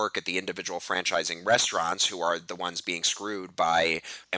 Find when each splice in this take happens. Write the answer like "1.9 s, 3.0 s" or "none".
none